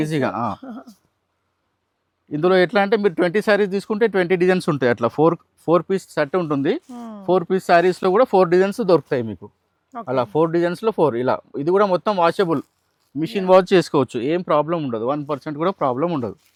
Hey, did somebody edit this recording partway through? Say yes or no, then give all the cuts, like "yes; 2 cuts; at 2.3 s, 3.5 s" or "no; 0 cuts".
no; 0 cuts